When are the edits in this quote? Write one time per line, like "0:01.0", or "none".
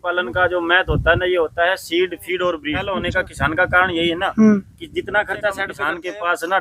0:02.9
0:05.7